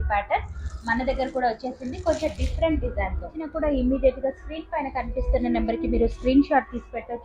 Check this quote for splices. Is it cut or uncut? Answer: cut